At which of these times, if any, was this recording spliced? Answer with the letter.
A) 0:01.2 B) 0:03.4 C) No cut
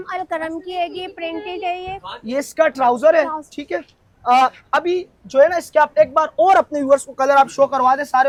C